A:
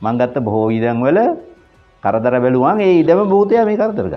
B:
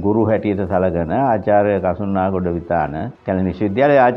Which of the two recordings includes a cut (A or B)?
B